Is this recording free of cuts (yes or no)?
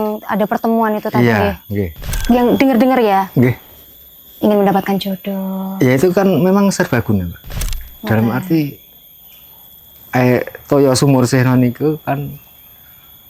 no